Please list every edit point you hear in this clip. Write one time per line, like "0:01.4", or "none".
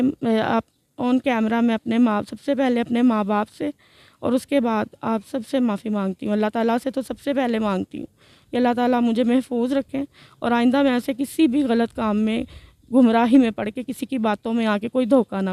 none